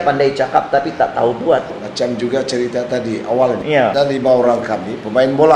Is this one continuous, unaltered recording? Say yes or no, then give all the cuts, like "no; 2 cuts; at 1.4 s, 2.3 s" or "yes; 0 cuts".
no; 2 cuts; at 1.8 s, 3.7 s